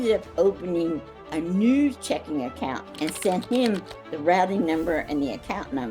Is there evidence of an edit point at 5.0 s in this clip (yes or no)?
no